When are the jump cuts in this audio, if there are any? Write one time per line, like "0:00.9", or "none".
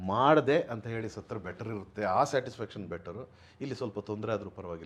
none